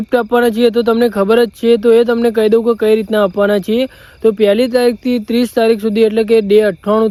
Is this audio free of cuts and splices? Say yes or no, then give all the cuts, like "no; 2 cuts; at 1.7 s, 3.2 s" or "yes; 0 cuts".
yes; 0 cuts